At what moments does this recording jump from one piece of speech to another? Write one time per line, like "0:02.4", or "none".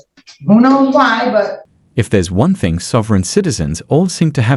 none

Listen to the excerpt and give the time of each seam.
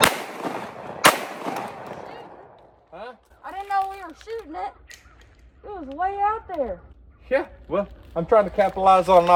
none

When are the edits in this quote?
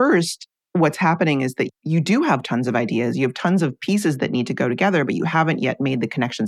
none

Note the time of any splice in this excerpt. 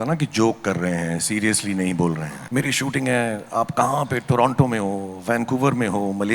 0:02.3

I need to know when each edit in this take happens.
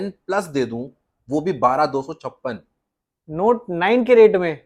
none

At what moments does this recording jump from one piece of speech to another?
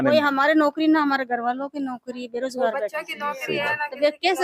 none

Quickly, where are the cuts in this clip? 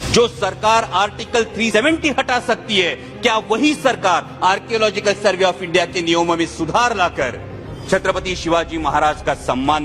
0:01.7

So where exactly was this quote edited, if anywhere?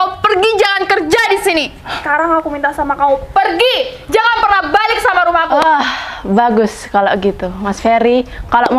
0:02.0

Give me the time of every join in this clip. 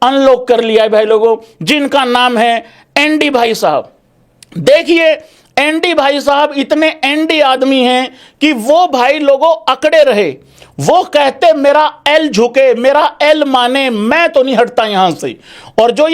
none

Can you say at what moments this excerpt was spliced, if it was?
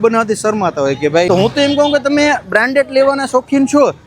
0:01.3

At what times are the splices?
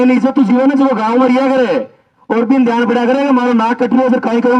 none

